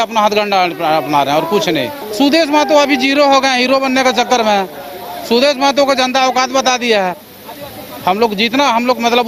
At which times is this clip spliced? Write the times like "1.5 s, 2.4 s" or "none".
2.0 s, 7.2 s